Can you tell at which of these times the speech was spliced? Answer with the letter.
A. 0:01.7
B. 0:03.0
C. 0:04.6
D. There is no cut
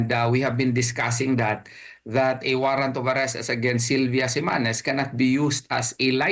D